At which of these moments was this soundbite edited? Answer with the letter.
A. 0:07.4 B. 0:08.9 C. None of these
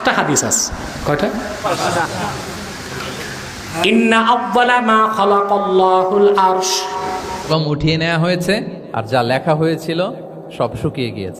A